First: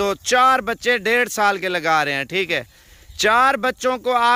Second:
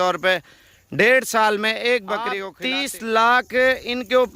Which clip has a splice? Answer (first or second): second